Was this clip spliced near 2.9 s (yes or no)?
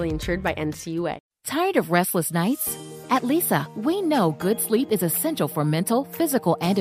no